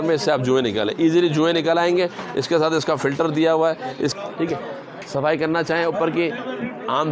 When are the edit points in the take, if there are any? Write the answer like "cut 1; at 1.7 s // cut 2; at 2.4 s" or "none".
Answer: cut 1; at 4.1 s